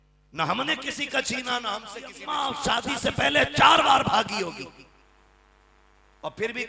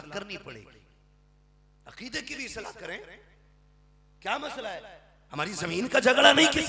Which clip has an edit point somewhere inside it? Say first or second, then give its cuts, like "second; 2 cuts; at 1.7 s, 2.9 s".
first; 1 cut; at 2.2 s